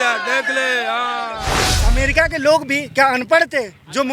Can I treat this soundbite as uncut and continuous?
no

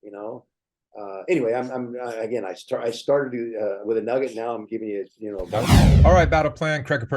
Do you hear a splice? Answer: yes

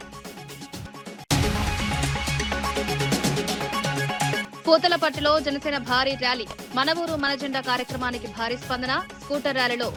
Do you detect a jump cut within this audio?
no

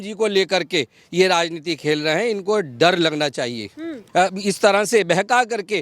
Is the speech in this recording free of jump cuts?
no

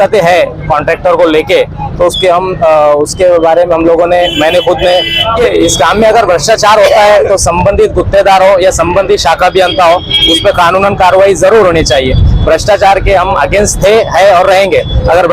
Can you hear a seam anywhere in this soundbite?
yes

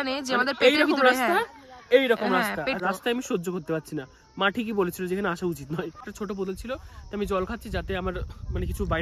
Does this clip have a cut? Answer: yes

